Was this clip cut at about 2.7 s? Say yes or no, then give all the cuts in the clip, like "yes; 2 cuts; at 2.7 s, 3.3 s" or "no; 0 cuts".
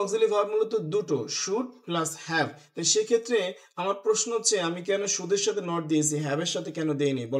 no; 0 cuts